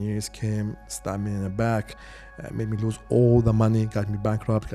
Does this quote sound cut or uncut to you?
uncut